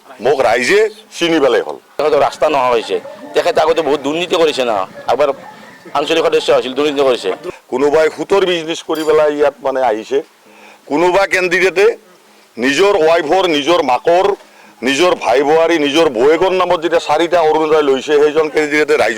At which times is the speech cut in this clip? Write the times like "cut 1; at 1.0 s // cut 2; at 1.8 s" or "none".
cut 1; at 2.0 s // cut 2; at 7.4 s